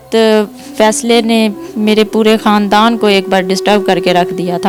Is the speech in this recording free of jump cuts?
yes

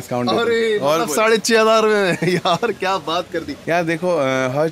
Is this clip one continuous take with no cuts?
no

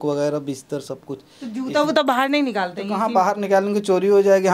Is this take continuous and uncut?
yes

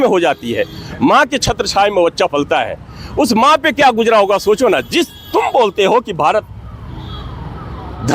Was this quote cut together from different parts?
no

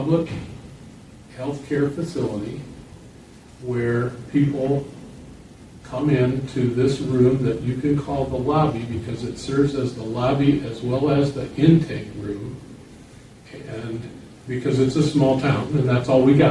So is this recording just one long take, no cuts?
yes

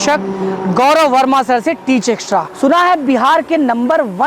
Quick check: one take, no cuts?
no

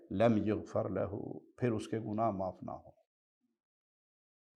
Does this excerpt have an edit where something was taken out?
no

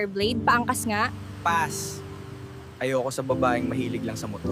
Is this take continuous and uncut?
yes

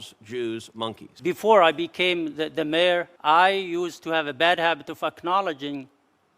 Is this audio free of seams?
no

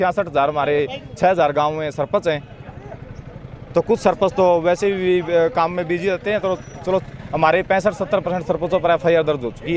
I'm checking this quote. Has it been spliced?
no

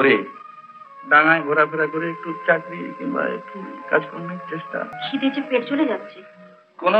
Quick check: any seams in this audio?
yes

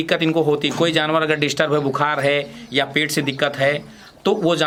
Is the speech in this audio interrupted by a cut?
no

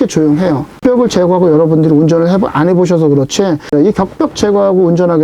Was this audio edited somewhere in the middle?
yes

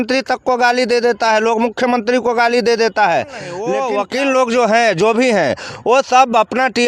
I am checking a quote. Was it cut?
yes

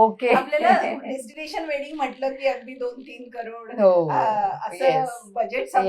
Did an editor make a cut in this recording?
no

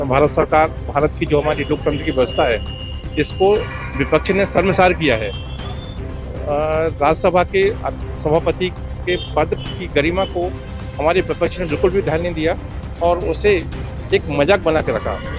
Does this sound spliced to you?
no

